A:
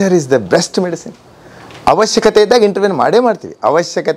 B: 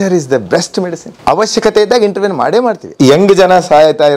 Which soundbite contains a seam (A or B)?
B